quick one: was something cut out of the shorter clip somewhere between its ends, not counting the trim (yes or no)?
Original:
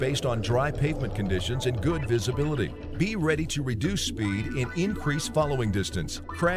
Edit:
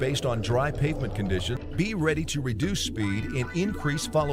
yes